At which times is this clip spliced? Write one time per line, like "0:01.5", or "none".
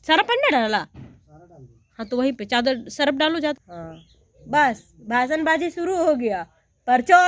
0:03.6